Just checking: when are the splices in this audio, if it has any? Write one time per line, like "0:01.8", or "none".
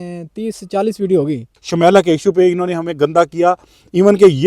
0:01.5